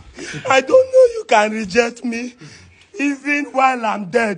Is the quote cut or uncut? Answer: uncut